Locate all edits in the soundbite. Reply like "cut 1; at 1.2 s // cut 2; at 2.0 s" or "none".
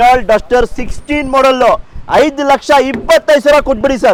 none